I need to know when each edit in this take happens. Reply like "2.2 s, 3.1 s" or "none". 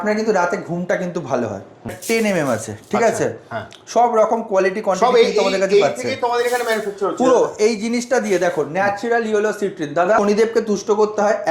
2.0 s, 10.2 s